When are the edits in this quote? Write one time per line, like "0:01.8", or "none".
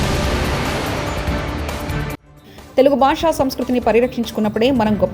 0:02.2